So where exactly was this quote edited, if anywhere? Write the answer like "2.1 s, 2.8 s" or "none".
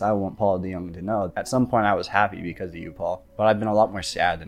1.3 s, 3.3 s